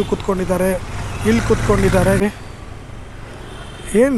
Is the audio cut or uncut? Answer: cut